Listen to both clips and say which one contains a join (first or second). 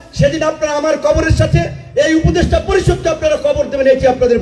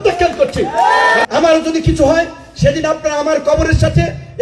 second